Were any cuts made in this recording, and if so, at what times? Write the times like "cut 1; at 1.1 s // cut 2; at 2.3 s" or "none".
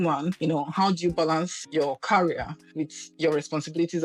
none